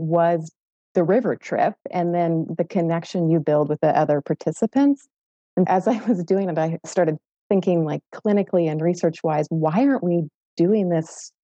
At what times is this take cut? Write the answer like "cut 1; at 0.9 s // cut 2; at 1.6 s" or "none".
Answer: cut 1; at 3.7 s // cut 2; at 5.7 s // cut 3; at 6.8 s